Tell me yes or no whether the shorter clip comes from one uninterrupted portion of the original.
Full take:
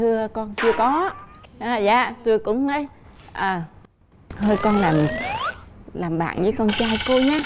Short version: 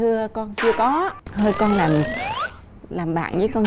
no